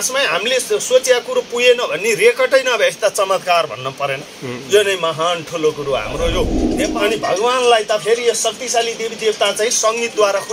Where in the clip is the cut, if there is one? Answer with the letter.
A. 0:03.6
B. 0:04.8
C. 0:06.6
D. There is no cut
C